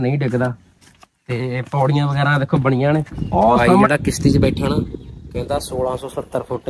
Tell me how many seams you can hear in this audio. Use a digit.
1